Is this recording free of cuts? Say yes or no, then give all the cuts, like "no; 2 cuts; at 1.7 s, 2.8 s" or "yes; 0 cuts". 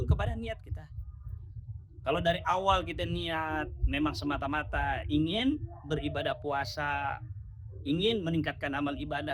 yes; 0 cuts